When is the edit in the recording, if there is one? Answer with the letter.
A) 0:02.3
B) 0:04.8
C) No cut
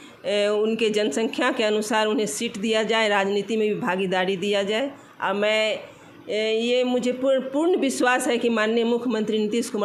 C